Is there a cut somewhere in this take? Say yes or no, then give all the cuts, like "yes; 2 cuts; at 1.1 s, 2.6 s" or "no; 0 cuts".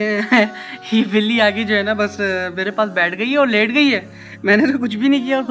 no; 0 cuts